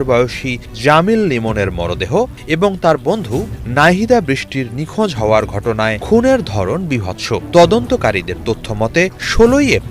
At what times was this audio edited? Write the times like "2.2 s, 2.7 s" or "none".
6.0 s